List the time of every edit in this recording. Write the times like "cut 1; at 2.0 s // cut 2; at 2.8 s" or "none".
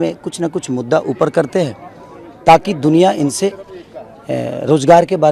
none